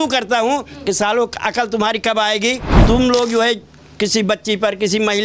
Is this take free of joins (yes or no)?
no